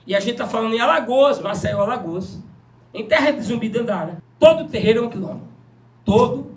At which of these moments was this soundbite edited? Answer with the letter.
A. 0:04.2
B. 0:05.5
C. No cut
A